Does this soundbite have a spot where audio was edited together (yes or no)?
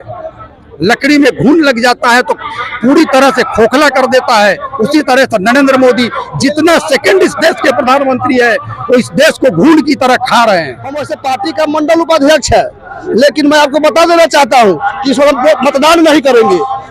yes